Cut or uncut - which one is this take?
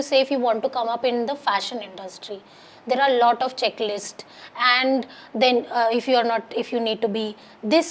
uncut